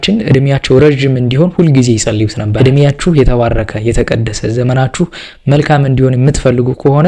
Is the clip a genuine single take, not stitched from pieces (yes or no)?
no